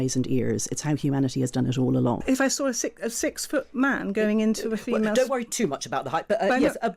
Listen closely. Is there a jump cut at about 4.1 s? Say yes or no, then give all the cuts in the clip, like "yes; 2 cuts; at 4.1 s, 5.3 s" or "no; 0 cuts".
no; 1 cut; at 2.2 s